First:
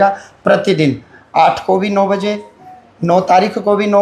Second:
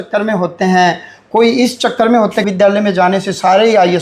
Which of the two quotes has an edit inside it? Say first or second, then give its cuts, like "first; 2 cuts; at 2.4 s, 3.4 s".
second; 1 cut; at 2.5 s